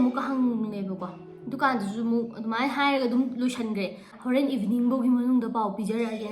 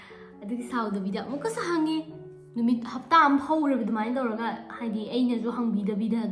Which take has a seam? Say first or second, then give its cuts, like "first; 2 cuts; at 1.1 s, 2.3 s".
first; 1 cut; at 4.1 s